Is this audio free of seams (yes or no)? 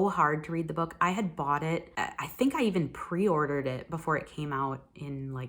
yes